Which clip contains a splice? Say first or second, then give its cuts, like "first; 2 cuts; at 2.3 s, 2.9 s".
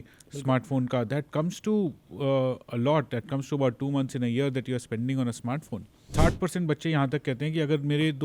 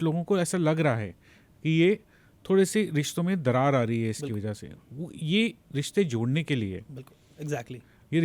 first; 1 cut; at 6.0 s